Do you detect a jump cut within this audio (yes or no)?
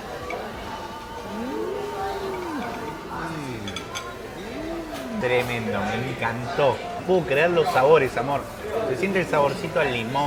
no